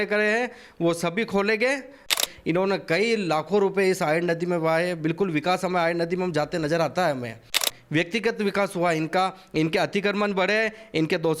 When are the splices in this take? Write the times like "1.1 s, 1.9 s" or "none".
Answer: 2.2 s, 7.7 s